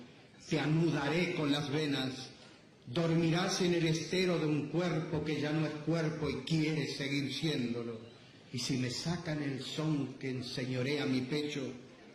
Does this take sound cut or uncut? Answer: cut